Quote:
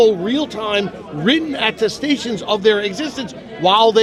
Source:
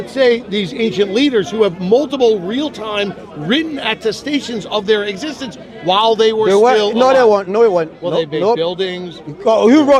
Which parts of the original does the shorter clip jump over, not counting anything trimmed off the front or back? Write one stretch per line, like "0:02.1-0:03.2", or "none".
none